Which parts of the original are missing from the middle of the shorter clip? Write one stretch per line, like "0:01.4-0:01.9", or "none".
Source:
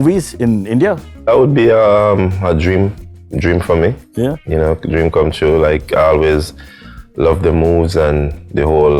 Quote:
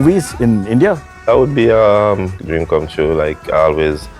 0:02.4-0:04.8